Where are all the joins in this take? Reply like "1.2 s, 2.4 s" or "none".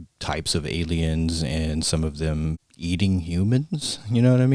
2.7 s